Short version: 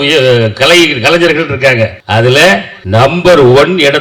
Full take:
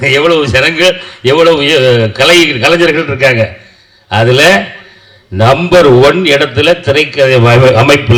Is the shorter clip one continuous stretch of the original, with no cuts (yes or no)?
no